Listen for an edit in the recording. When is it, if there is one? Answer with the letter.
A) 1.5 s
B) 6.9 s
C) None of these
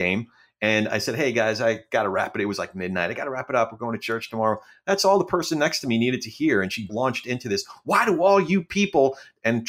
B